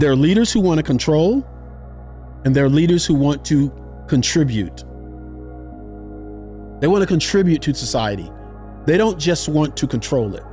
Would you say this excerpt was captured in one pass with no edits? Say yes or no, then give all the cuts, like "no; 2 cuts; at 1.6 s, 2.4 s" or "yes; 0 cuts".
yes; 0 cuts